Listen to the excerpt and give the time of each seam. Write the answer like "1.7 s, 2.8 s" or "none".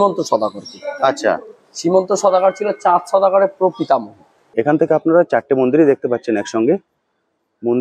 4.4 s